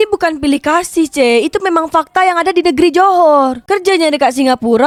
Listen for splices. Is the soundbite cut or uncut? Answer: uncut